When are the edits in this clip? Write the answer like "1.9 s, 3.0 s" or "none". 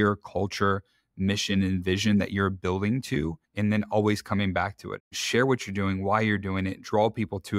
3.4 s, 5.1 s